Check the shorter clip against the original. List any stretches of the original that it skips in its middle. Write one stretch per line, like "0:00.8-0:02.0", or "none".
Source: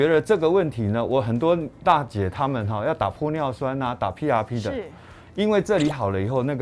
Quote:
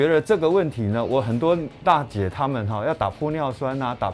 none